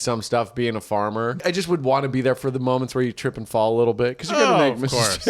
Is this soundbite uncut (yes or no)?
no